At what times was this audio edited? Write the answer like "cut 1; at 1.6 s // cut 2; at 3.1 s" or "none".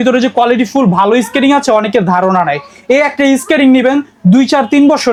none